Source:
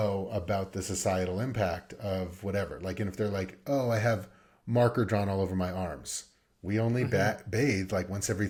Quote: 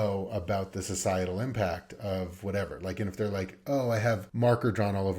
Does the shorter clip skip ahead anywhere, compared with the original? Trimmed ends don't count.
yes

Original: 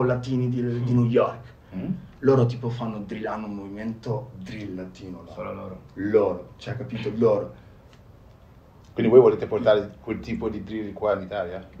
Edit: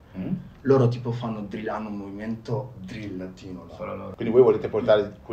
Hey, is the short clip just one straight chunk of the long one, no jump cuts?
no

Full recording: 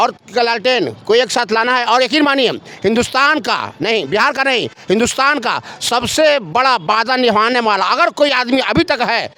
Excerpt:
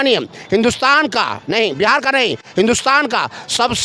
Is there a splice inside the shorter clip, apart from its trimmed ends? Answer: no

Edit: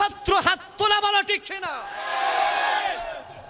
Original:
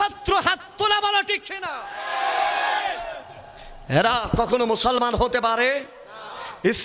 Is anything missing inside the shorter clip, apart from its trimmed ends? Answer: no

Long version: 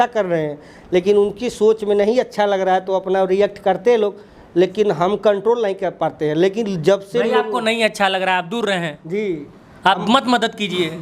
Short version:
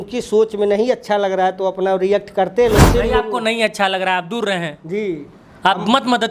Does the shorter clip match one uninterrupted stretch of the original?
no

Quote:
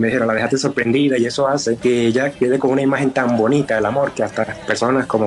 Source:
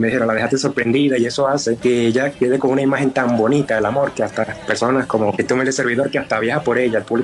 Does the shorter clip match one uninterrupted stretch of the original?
yes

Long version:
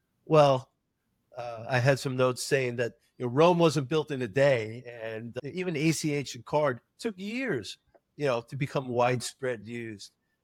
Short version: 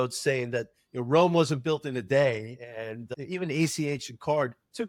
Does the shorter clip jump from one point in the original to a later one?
no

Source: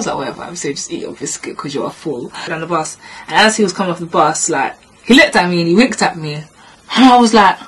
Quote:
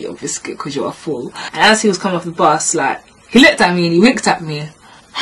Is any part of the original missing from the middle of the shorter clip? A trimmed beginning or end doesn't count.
yes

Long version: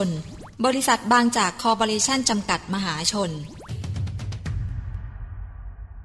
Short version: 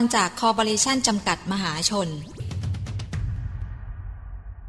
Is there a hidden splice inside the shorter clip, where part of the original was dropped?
yes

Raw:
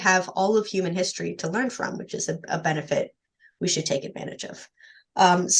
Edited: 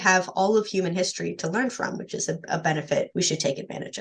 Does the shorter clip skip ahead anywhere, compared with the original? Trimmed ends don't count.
yes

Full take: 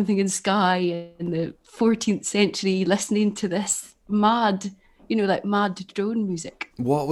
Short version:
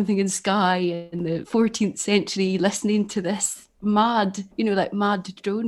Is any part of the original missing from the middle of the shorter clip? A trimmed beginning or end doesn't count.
yes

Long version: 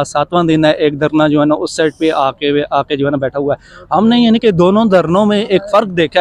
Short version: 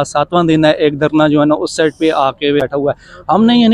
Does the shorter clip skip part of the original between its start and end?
yes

